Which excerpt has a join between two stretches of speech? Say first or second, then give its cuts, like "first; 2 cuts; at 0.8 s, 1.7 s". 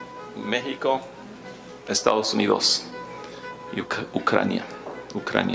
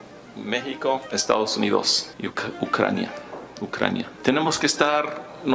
second; 3 cuts; at 1.1 s, 2.0 s, 4.1 s